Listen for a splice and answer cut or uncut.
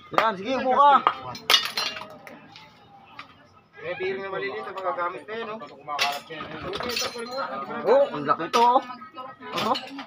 cut